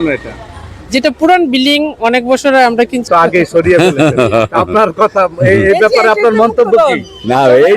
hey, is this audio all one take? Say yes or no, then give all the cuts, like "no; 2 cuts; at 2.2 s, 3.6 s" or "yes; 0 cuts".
no; 1 cut; at 3.1 s